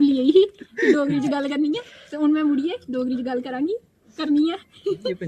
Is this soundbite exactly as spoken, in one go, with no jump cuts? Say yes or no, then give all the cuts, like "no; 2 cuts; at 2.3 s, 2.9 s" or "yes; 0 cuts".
yes; 0 cuts